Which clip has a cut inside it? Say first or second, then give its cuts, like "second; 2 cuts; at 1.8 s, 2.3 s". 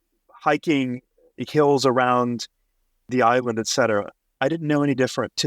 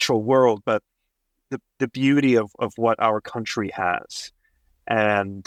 first; 1 cut; at 3.1 s